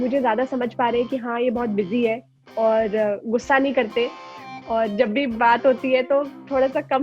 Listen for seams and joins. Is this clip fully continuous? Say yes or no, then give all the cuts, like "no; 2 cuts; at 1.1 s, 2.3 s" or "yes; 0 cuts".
yes; 0 cuts